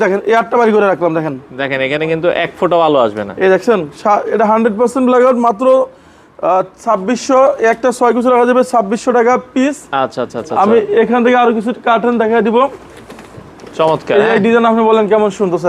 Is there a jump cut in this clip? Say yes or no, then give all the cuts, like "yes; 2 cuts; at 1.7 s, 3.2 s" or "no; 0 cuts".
no; 0 cuts